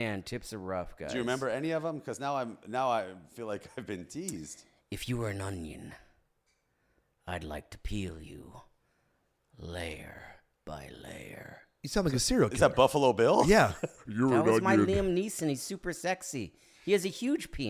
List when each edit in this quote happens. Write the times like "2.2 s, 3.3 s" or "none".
none